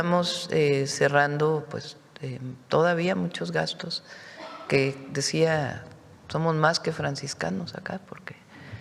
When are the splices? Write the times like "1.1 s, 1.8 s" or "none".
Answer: none